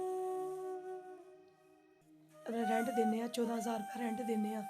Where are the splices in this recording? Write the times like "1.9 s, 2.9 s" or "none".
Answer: 1.9 s